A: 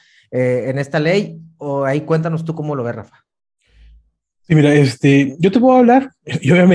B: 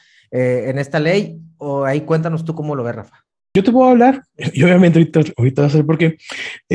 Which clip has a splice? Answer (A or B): B